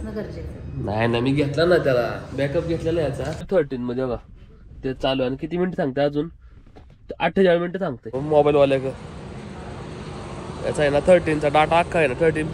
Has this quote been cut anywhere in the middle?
yes; 2 cuts; at 3.5 s, 8.2 s

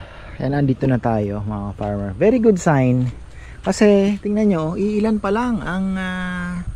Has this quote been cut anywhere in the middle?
no; 0 cuts

